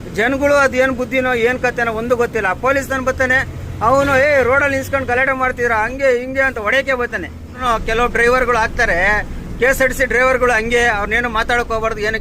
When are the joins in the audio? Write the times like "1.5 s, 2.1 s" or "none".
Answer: 7.6 s